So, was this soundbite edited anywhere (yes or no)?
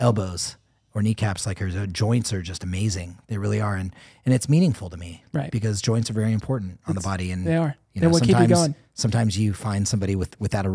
no